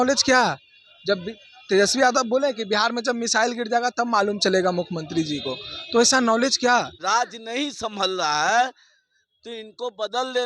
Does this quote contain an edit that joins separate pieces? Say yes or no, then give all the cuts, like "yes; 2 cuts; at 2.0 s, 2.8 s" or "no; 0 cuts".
yes; 1 cut; at 7.0 s